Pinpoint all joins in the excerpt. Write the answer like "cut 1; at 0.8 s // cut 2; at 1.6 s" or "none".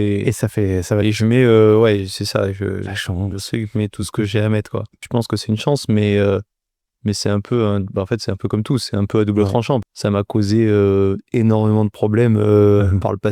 cut 1; at 5.0 s // cut 2; at 9.9 s